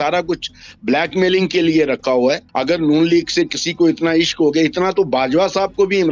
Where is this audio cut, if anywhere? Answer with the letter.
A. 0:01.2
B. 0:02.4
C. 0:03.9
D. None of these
B